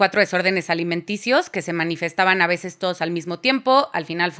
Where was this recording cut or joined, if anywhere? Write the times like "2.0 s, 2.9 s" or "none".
none

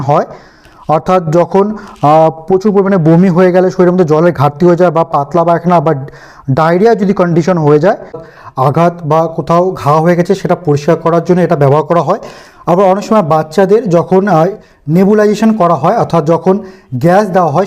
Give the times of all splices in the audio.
8.3 s

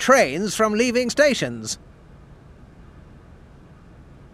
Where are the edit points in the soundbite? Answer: 1.8 s

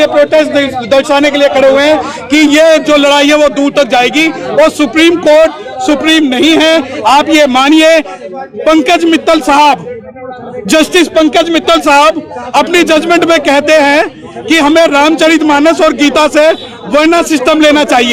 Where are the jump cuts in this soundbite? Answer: none

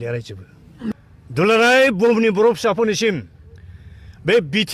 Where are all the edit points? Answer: 0.9 s

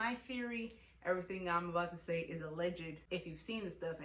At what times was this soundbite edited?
2.9 s

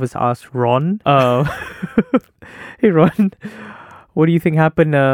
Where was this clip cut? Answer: 1.0 s

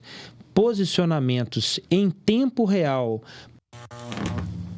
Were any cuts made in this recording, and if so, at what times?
3.9 s

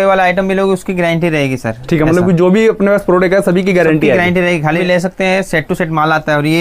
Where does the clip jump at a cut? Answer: 4.8 s

